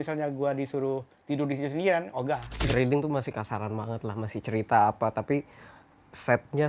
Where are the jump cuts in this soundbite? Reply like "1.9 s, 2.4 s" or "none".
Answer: 2.6 s

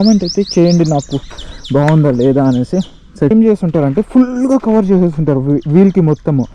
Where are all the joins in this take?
3.3 s

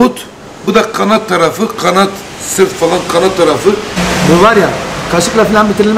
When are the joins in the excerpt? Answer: 4.0 s

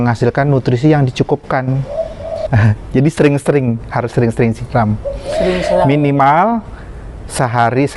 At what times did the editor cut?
2.4 s

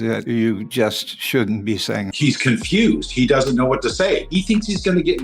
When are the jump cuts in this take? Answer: 2.1 s, 4.3 s

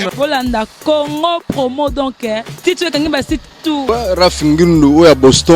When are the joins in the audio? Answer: 3.8 s

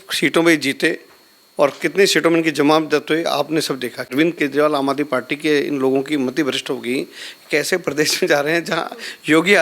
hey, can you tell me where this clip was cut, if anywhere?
4.1 s

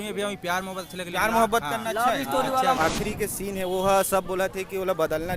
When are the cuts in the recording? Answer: 2.8 s

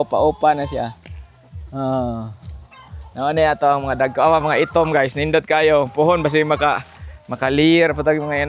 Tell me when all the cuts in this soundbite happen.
none

